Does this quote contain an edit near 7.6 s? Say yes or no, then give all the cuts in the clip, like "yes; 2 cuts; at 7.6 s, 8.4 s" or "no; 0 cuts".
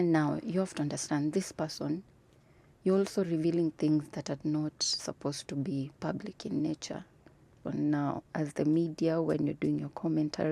yes; 1 cut; at 7.6 s